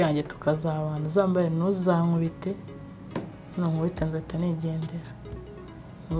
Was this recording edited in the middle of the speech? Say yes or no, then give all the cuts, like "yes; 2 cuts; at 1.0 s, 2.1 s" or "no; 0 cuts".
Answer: no; 0 cuts